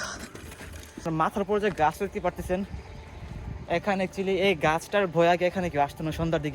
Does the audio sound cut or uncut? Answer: cut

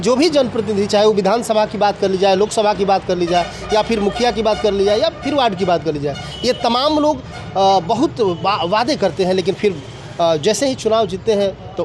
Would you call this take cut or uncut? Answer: uncut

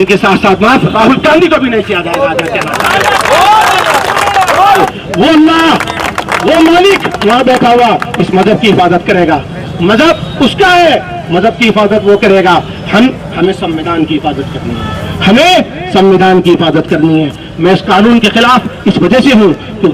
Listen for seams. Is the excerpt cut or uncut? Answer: cut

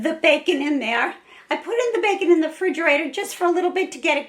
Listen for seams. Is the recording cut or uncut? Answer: uncut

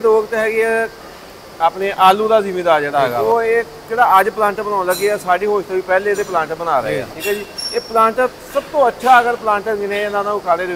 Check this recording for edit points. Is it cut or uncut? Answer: cut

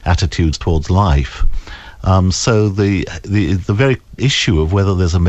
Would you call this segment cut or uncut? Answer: uncut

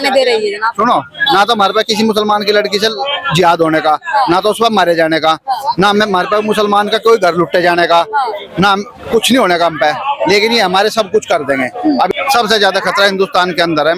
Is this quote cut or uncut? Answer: cut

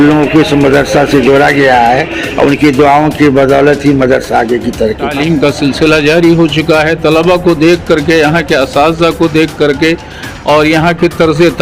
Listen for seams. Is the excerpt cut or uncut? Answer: cut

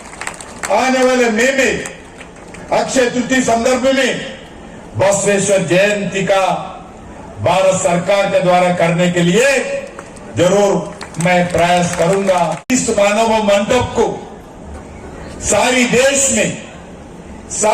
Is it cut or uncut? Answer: cut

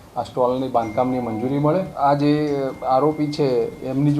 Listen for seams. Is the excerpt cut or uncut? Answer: cut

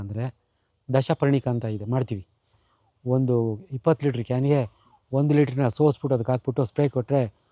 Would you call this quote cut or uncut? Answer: cut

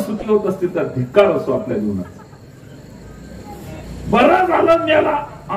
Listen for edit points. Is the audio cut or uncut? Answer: cut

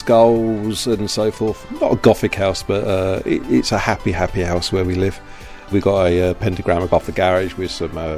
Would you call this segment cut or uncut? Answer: cut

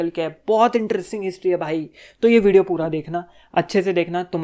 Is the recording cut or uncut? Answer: uncut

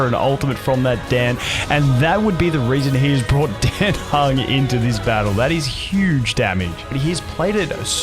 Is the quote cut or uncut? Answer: cut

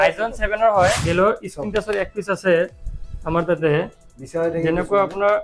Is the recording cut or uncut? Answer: cut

